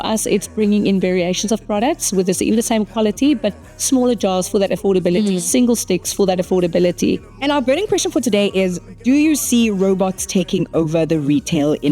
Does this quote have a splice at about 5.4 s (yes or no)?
no